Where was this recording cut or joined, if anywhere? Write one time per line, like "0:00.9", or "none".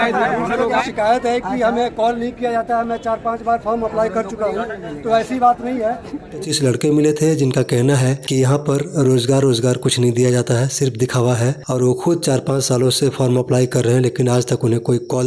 0:00.8
0:06.5